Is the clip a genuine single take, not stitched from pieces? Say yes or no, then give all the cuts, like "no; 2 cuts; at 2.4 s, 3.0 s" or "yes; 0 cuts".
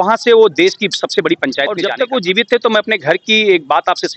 no; 1 cut; at 1.8 s